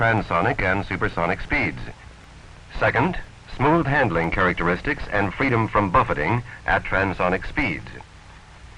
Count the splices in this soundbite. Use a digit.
1